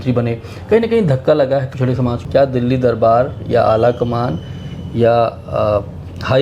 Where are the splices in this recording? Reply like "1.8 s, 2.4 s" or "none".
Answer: 2.2 s